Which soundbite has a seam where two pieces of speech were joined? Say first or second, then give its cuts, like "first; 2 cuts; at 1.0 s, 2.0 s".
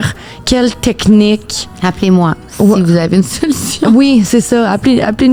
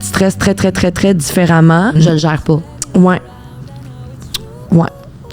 second; 1 cut; at 2.0 s